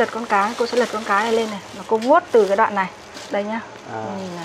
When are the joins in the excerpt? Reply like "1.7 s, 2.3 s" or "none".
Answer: 3.1 s